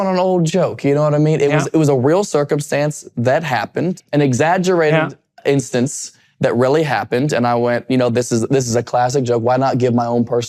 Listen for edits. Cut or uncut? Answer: cut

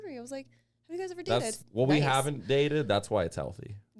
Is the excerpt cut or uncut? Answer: cut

